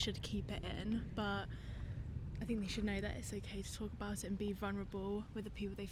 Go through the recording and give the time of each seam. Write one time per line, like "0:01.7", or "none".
none